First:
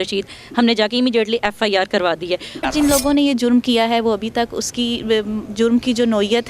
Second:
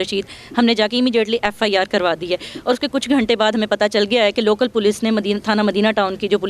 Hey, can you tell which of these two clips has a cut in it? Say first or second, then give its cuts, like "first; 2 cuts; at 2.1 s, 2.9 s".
first; 1 cut; at 2.6 s